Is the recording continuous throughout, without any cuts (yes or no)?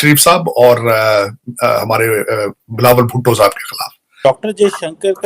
no